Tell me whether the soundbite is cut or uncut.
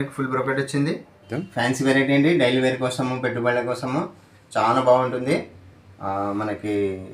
cut